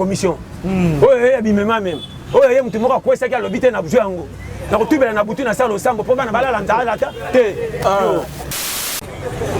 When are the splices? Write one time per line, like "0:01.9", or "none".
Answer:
0:08.7